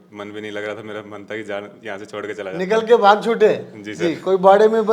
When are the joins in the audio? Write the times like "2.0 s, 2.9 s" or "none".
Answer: none